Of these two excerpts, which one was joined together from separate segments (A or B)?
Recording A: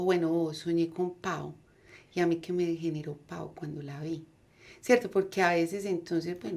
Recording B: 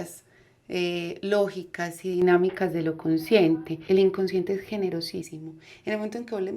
B